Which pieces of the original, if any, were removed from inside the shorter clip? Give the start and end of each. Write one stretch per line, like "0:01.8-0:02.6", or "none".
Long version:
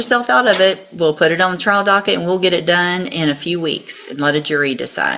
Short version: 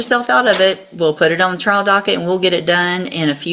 none